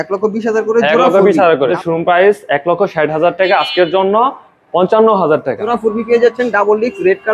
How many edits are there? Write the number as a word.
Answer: two